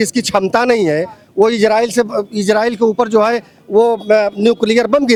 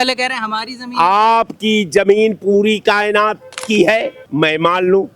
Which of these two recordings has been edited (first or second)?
second